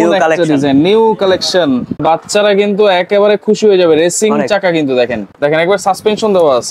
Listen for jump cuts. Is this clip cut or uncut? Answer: cut